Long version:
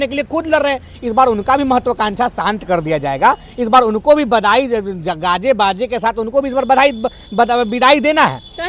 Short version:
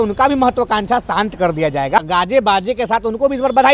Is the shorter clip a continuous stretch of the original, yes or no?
no